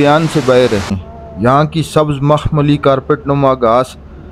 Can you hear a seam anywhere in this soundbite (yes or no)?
yes